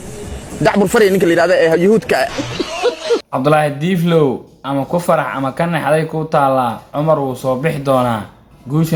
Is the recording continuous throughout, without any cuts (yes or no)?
yes